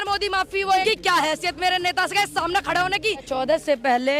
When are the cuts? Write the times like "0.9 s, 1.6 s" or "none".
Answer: 0.8 s, 3.3 s